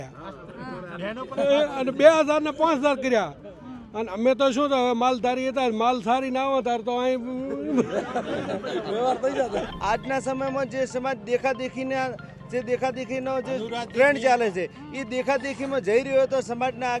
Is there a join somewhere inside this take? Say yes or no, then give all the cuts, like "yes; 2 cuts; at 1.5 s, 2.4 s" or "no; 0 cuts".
yes; 1 cut; at 9.7 s